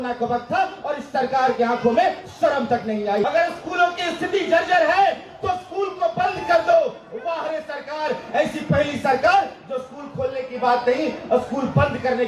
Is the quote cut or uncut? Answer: cut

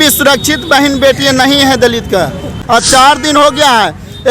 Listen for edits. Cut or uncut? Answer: cut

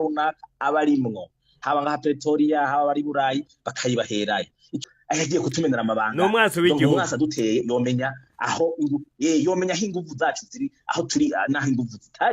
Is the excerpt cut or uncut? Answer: cut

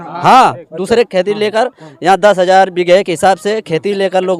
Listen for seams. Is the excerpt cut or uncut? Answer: uncut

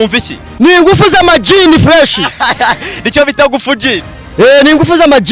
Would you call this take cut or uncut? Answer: uncut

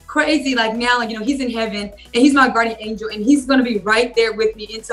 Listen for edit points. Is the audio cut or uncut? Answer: uncut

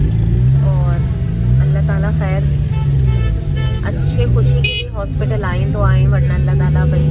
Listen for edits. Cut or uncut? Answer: uncut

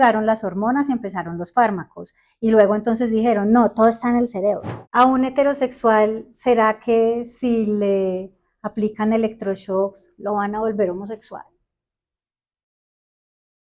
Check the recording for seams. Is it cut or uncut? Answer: cut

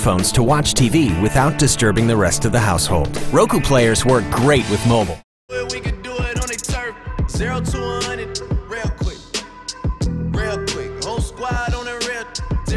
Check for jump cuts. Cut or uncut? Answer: cut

